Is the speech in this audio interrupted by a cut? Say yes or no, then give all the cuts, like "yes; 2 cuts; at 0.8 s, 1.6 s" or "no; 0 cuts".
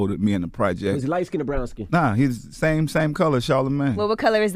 no; 0 cuts